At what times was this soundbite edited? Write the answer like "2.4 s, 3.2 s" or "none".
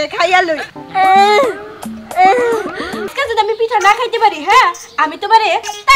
3.2 s